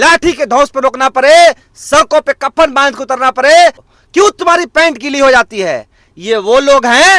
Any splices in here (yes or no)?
yes